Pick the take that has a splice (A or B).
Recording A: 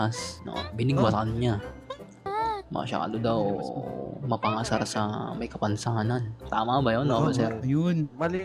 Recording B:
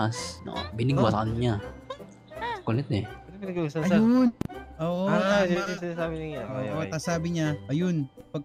A